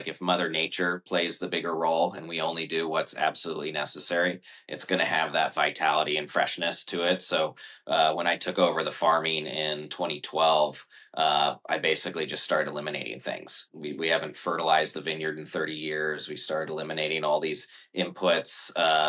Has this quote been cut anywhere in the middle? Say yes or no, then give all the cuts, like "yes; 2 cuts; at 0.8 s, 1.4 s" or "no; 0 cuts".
yes; 1 cut; at 13.7 s